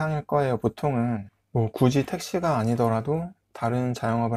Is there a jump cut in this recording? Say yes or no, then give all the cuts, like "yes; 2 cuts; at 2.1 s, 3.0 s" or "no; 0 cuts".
yes; 1 cut; at 1.3 s